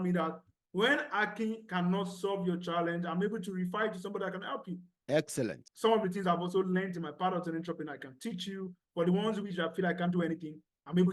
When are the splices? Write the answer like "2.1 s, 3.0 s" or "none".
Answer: 5.6 s